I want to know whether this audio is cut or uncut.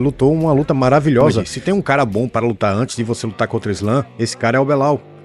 cut